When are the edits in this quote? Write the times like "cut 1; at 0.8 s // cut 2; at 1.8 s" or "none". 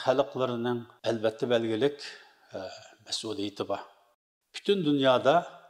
cut 1; at 4.2 s